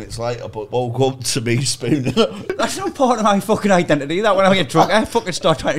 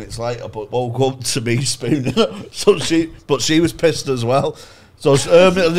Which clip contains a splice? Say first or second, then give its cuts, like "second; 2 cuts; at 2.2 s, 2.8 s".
first; 1 cut; at 2.5 s